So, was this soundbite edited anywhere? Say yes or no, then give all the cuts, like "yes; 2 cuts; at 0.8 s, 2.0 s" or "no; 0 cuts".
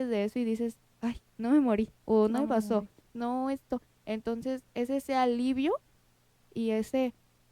no; 0 cuts